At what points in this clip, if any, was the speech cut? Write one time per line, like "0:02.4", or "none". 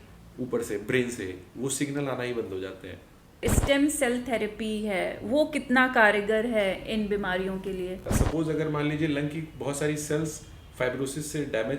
0:03.4
0:08.1